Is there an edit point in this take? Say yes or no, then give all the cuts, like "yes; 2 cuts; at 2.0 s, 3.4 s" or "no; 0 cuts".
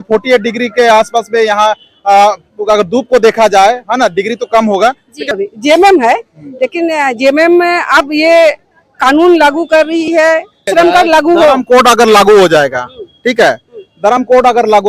yes; 2 cuts; at 5.1 s, 10.7 s